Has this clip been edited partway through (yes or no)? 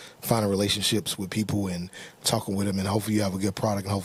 no